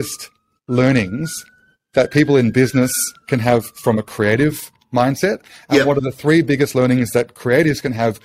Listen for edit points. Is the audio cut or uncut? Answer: uncut